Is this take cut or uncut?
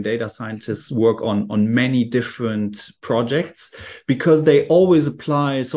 uncut